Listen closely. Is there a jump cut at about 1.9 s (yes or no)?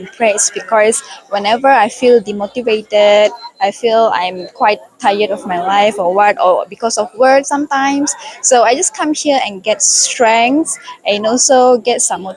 no